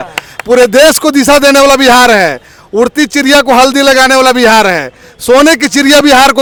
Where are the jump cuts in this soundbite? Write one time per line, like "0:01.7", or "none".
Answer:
none